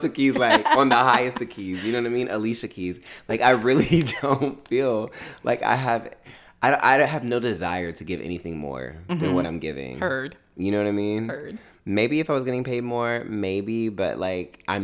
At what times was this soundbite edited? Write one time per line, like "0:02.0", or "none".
none